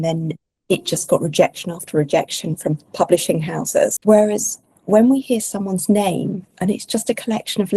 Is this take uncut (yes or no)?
no